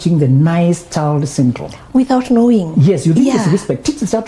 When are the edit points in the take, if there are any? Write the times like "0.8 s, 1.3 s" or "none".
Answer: 1.7 s